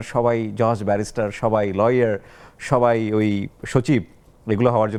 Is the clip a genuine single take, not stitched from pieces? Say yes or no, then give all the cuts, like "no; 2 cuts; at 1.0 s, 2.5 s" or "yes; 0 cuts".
yes; 0 cuts